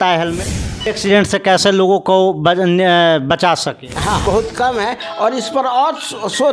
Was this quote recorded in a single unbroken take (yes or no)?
no